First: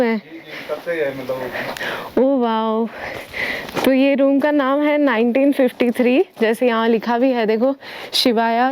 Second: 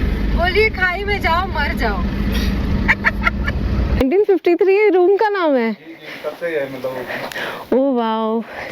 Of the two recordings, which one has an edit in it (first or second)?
second